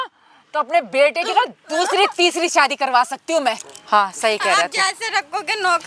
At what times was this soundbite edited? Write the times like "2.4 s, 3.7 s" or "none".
3.7 s